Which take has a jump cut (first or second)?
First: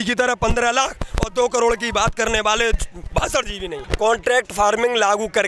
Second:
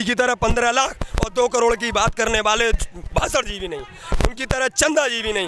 first